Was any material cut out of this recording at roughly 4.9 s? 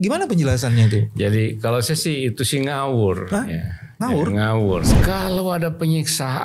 yes; 1 cut; at 4.9 s

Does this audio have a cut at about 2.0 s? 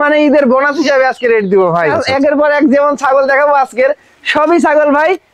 yes; 1 cut; at 2.0 s

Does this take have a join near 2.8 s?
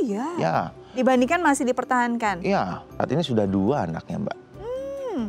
yes; 1 cut; at 2.8 s

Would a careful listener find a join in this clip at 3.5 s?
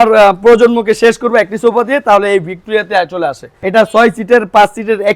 yes; 1 cut; at 3.5 s

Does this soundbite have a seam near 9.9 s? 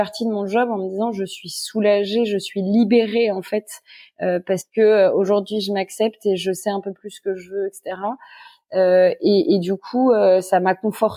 no; 0 cuts

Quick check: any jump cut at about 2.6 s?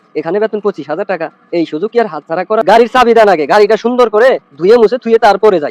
yes; 1 cut; at 2.6 s

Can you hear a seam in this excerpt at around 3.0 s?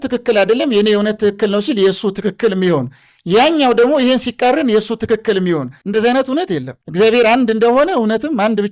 no; 2 cuts; at 5.8 s, 6.8 s

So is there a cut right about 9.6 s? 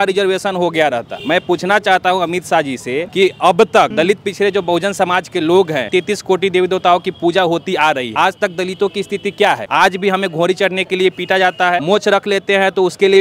yes; 7 cuts; at 1.1 s, 3.1 s, 3.9 s, 5.9 s, 8.1 s, 9.6 s, 11.8 s

